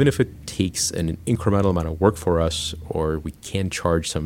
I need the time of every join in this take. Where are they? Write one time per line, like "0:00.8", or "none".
0:00.8
0:02.9